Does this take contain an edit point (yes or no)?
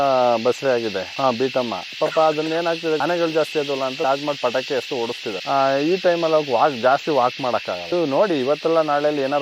yes